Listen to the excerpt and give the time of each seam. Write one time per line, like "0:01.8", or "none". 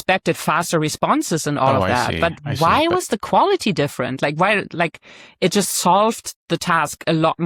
none